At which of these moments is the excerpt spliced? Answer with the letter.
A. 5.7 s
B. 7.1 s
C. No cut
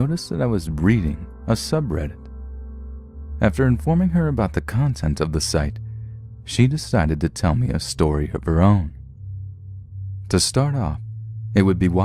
B